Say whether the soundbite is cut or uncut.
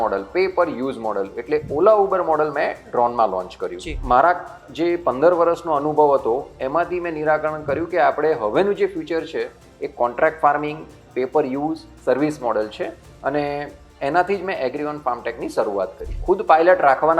cut